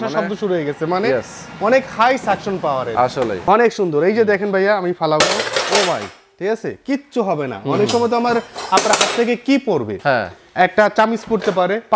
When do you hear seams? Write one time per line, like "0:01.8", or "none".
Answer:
0:03.4

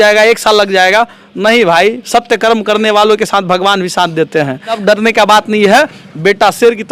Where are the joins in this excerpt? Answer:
0:04.8

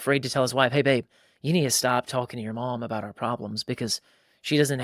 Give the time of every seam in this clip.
none

